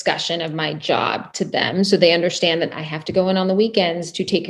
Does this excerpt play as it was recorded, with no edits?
yes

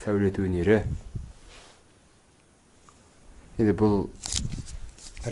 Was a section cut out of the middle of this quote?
no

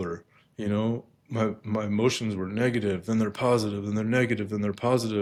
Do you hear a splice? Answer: no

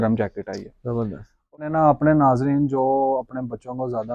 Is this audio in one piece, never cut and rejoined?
no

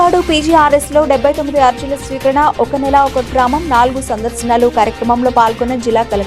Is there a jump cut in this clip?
no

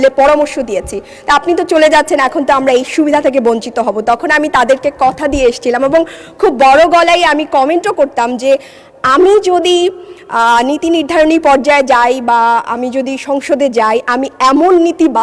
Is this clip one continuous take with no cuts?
yes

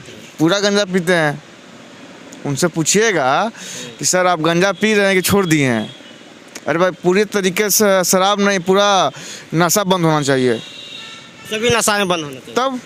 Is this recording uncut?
yes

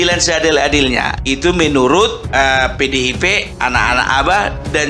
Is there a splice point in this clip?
yes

